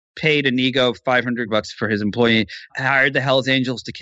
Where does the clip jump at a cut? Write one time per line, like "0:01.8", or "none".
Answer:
0:01.5